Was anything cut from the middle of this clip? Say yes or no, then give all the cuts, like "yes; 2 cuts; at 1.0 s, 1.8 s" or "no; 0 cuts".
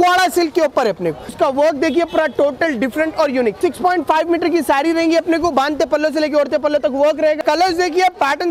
yes; 3 cuts; at 1.3 s, 3.6 s, 7.4 s